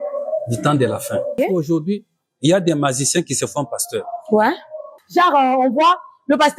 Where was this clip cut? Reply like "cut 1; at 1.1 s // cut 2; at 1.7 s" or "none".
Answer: cut 1; at 1.4 s // cut 2; at 5.0 s